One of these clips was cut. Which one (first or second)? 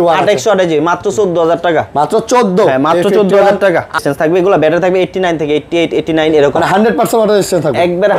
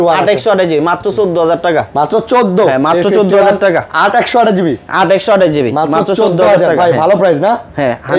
first